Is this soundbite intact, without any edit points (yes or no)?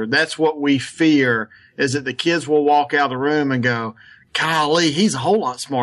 yes